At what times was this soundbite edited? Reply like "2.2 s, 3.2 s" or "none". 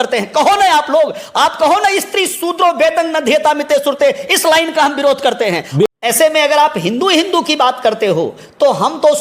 5.7 s